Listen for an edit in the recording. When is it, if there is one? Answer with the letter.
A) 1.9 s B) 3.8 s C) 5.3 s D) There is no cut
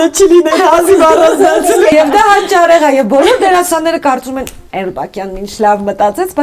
A